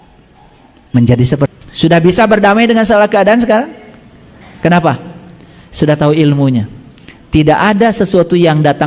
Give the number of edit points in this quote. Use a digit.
1